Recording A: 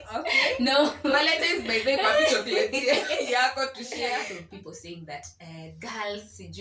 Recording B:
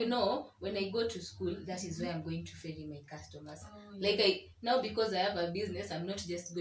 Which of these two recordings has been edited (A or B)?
A